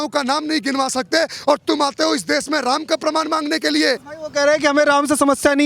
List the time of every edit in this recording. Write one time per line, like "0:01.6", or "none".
0:04.2